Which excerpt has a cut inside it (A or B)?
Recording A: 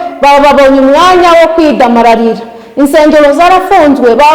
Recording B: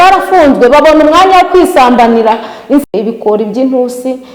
B